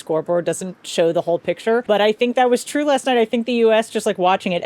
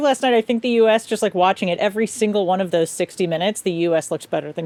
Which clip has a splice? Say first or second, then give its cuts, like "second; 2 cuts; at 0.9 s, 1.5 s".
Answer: first; 1 cut; at 1.8 s